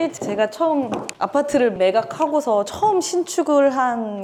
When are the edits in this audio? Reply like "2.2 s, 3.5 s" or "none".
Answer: none